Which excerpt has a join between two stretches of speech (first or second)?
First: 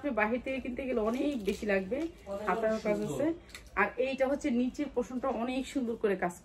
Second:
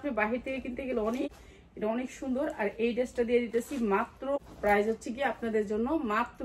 second